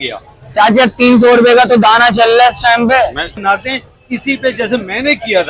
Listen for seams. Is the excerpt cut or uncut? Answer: cut